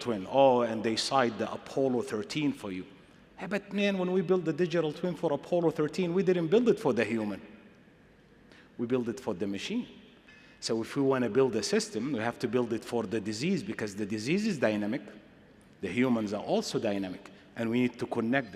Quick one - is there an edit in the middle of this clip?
no; 0 cuts

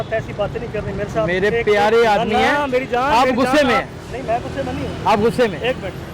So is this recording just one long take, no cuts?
yes; 0 cuts

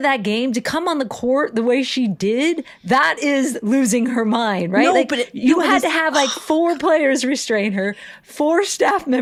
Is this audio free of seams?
yes; 0 cuts

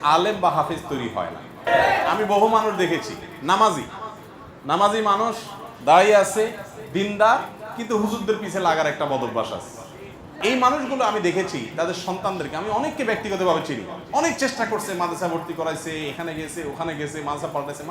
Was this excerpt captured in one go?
no; 2 cuts; at 1.7 s, 10.3 s

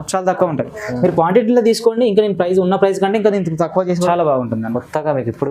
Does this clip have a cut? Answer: yes; 1 cut; at 4.1 s

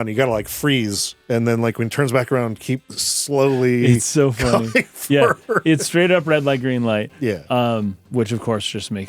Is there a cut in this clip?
yes; 3 cuts; at 1.1 s, 2.9 s, 8.0 s

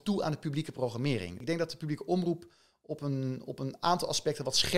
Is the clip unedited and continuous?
no; 1 cut; at 1.3 s

